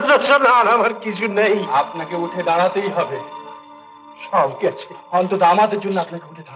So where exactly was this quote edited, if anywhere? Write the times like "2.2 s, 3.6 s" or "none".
none